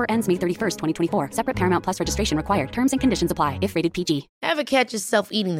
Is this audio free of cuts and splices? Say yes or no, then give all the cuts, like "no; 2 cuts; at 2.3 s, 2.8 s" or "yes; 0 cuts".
no; 1 cut; at 4.3 s